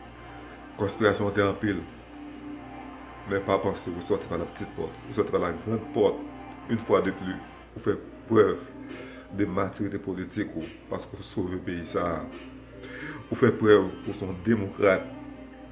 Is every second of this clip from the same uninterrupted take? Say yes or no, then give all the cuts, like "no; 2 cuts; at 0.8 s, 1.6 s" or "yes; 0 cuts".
no; 1 cut; at 5.5 s